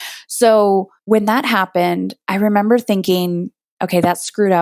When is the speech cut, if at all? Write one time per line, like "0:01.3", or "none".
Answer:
0:00.9